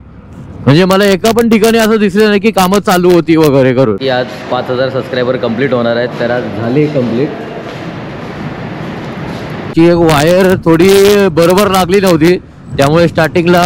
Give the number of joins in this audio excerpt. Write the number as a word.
two